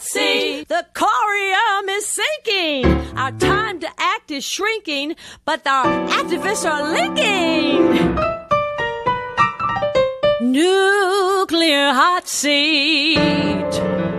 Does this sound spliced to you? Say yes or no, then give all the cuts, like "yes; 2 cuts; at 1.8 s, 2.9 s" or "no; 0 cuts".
no; 0 cuts